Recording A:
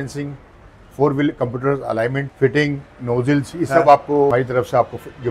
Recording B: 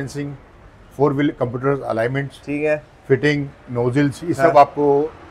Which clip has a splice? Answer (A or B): A